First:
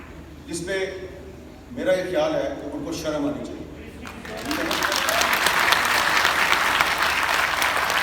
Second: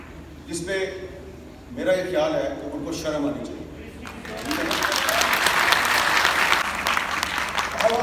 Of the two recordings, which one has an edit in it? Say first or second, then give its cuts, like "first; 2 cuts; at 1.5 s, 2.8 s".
second; 1 cut; at 6.6 s